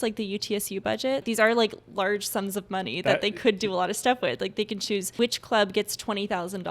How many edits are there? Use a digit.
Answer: 2